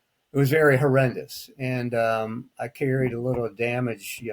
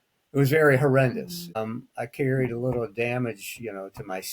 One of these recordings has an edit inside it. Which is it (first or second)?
second